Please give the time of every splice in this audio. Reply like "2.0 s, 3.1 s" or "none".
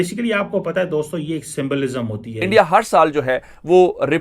2.5 s